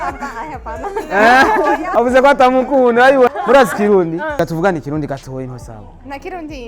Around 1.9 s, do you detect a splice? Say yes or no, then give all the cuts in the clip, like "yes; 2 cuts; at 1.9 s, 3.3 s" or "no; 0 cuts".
yes; 3 cuts; at 1.9 s, 3.3 s, 4.4 s